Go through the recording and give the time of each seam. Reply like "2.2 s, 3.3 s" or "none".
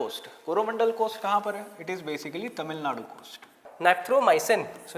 3.6 s